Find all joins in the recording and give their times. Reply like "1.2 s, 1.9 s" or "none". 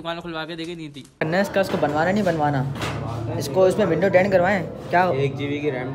1.1 s